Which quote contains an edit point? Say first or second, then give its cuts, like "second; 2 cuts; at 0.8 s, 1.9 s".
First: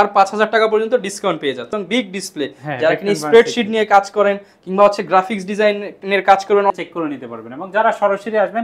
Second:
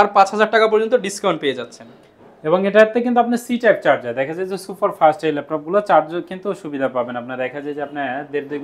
first; 2 cuts; at 1.8 s, 6.7 s